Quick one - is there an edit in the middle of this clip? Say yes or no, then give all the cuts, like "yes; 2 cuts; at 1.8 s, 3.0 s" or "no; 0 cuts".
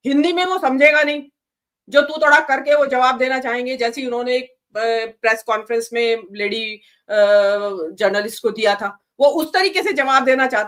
no; 0 cuts